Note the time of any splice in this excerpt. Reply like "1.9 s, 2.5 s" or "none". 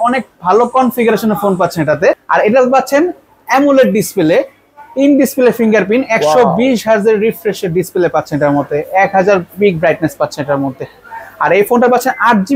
2.2 s

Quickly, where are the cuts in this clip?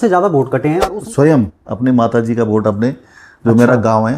0.9 s

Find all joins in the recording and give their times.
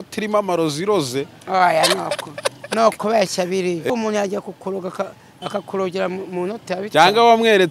3.9 s

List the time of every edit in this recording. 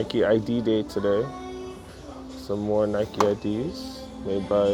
none

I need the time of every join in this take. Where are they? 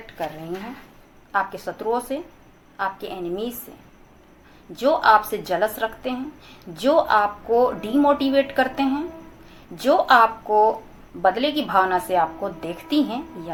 none

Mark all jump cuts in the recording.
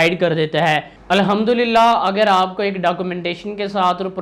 none

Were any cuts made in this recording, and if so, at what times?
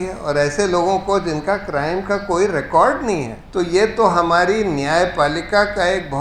3.4 s

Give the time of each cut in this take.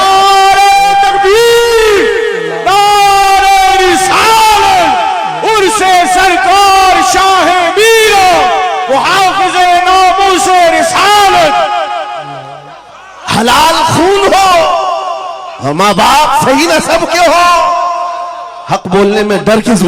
none

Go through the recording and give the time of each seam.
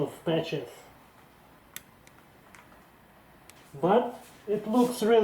1.0 s, 3.6 s, 4.3 s

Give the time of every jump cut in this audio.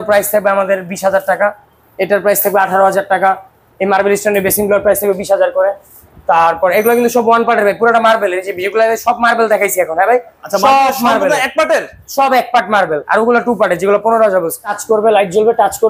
14.8 s

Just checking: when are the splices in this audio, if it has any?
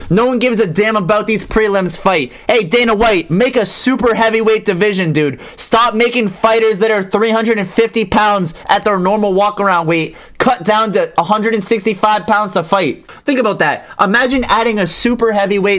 13.1 s

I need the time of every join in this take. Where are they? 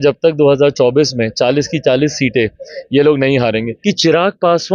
3.7 s

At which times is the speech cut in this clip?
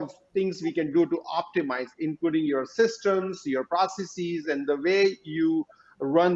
none

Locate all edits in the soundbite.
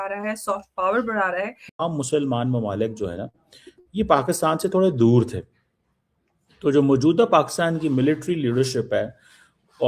1.8 s

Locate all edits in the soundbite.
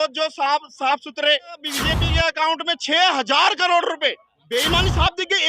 1.7 s, 4.3 s

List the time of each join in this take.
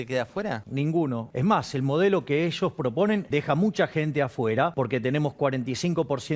1.1 s, 3.2 s, 4.7 s

